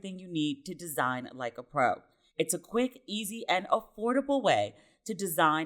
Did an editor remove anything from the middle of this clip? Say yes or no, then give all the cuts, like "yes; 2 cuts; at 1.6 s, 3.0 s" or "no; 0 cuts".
yes; 1 cut; at 2.2 s